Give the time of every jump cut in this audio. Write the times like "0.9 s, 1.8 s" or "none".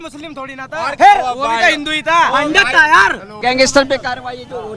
none